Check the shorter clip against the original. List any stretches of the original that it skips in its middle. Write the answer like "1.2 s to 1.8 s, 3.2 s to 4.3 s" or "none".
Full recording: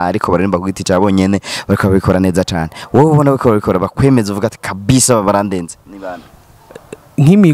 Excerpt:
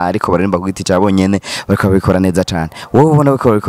none